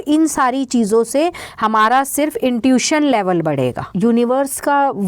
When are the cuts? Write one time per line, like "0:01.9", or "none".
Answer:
0:03.8